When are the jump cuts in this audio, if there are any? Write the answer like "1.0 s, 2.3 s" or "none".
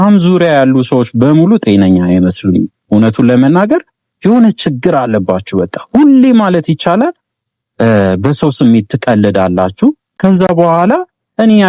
none